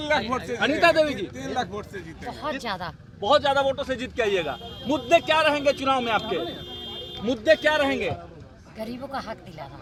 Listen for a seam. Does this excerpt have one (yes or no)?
no